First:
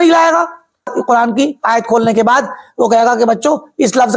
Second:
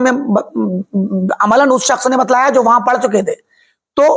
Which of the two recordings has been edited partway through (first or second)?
first